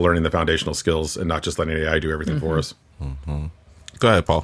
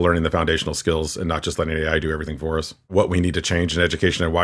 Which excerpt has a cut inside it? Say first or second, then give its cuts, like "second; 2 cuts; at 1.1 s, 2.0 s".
second; 1 cut; at 2.9 s